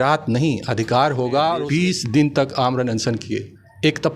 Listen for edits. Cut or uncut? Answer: cut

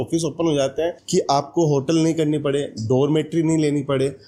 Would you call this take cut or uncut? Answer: uncut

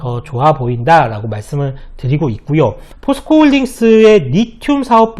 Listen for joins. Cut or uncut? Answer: cut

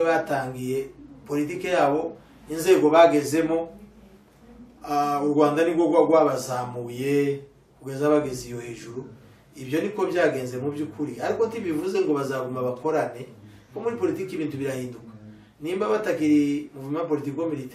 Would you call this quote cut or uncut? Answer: uncut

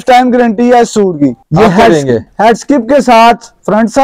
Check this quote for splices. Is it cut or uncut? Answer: cut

